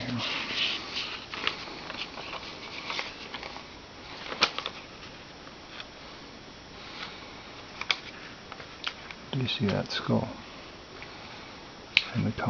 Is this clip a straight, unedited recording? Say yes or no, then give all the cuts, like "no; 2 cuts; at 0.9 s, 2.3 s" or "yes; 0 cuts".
no; 1 cut; at 10.3 s